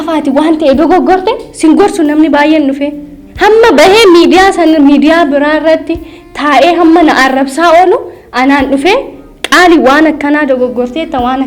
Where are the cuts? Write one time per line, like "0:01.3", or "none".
none